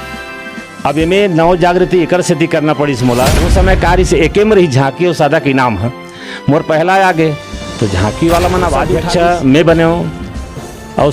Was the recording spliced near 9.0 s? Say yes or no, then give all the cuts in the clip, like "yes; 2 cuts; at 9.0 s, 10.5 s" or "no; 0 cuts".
yes; 2 cuts; at 3.4 s, 9.0 s